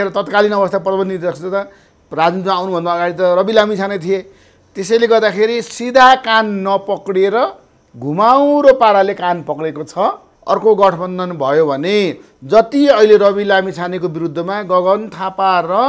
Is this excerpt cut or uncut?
cut